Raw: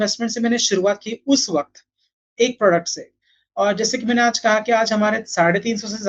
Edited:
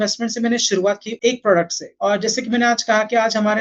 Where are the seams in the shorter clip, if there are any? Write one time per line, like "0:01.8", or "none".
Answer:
0:01.1
0:01.8